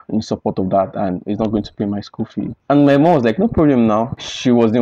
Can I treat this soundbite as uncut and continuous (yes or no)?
yes